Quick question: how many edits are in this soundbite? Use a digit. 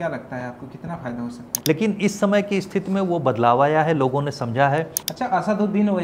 2